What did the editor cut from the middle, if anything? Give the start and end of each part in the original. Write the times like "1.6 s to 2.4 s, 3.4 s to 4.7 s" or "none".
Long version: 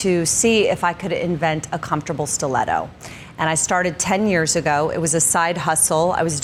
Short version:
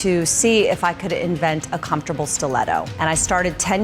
2.9 s to 3.3 s